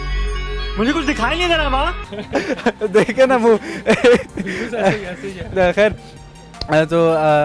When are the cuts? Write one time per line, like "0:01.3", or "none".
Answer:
none